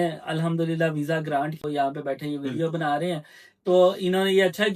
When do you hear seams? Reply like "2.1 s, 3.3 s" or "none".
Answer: 1.6 s